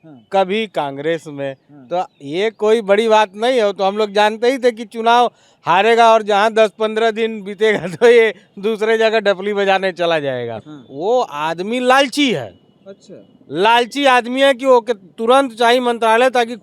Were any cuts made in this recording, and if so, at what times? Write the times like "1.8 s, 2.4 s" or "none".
10.6 s